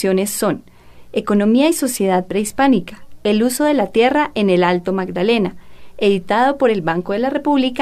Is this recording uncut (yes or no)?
yes